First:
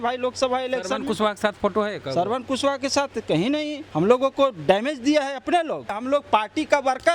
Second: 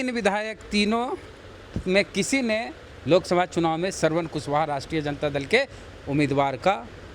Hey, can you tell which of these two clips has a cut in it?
first; 2 cuts; at 3.8 s, 5.9 s

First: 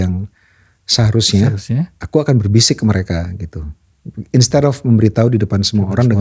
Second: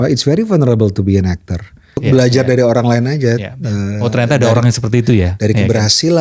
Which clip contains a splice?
second; 1 cut; at 2.0 s

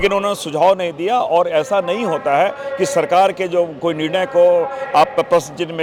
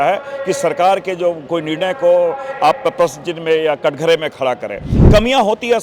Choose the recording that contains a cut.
second; 1 cut; at 4.9 s

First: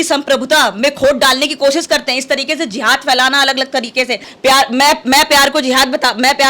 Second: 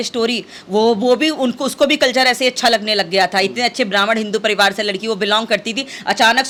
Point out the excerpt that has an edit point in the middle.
first; 1 cut; at 4.3 s

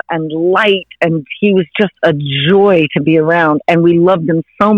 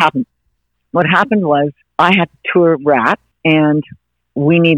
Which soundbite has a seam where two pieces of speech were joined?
second; 2 cuts; at 1.8 s, 3.3 s

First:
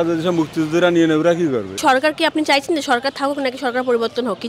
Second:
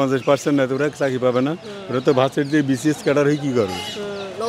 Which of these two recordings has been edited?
first; 1 cut; at 1.8 s

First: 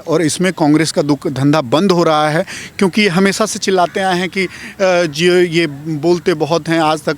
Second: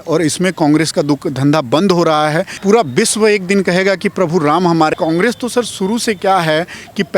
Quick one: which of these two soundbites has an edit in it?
second; 2 cuts; at 2.5 s, 4.9 s

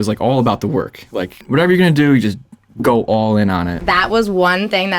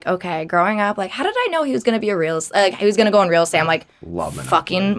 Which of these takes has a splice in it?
first; 2 cuts; at 1.4 s, 3.8 s

